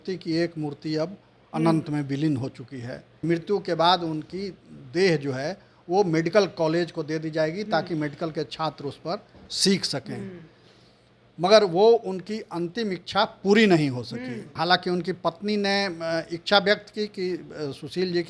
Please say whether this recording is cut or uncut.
cut